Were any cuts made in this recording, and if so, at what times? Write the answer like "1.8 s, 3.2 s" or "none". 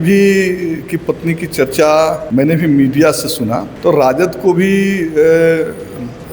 2.2 s, 3.7 s